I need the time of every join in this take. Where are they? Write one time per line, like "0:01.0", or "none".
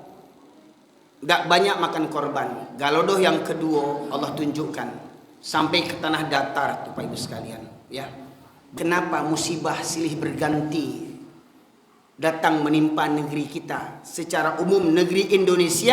0:08.7

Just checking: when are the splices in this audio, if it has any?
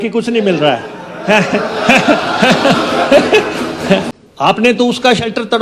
0:04.1

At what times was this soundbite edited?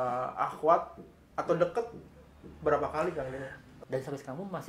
0:03.6

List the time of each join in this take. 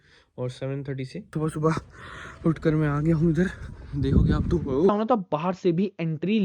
0:01.2
0:04.9

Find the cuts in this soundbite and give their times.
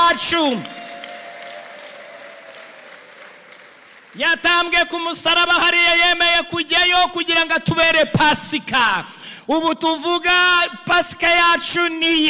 none

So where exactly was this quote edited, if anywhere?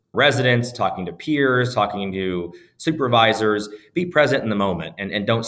none

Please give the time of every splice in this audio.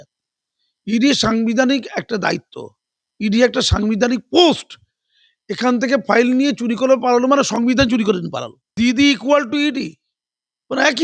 0:08.6

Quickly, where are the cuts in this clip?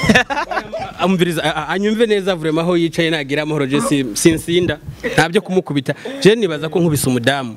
none

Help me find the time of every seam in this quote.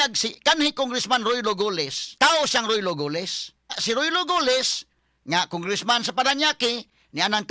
0:02.1
0:03.8

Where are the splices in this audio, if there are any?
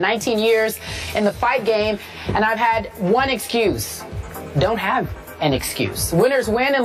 none

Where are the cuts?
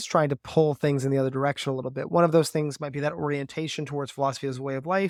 none

